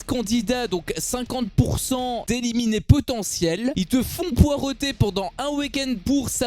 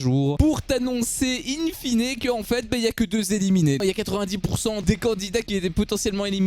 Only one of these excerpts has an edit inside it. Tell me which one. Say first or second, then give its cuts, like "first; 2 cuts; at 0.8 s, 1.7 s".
second; 1 cut; at 3.8 s